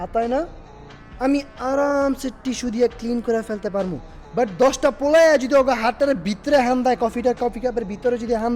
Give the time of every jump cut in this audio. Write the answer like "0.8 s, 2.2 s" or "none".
none